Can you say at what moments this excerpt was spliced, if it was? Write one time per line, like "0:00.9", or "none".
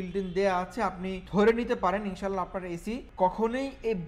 0:01.1
0:03.1